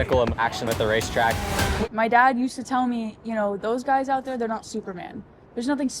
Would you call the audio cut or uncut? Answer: cut